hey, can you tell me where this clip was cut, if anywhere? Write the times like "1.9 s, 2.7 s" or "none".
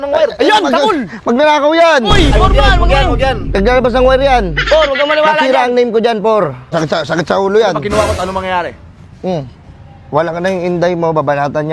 6.7 s